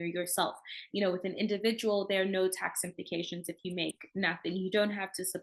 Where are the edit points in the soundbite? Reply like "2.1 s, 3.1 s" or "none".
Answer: none